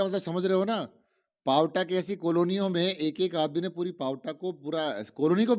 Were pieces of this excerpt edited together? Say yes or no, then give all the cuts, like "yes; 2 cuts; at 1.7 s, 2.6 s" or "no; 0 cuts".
no; 0 cuts